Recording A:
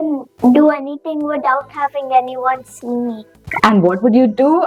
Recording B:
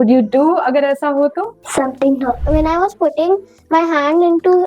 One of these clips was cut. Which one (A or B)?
B